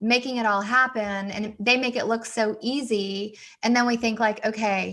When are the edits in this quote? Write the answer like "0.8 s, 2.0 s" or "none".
none